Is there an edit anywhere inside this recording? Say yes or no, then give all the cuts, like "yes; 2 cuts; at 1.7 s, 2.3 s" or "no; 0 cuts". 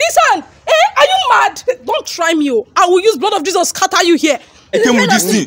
yes; 2 cuts; at 1.6 s, 4.7 s